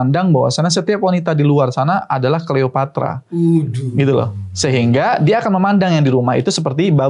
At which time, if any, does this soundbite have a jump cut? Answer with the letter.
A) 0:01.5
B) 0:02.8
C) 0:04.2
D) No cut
D